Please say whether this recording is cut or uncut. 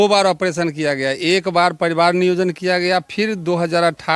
uncut